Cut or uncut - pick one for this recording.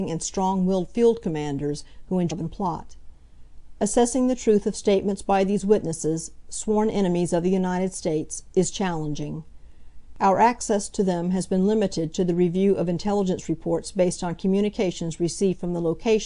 uncut